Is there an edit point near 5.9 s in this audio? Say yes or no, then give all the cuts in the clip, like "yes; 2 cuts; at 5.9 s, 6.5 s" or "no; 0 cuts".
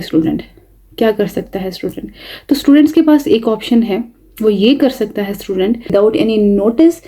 yes; 1 cut; at 5.9 s